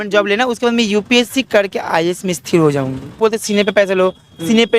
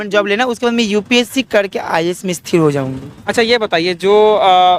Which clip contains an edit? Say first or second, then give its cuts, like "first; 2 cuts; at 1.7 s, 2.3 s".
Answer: first; 1 cut; at 3.2 s